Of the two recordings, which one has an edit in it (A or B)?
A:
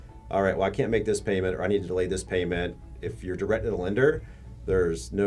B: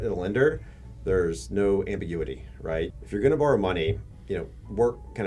B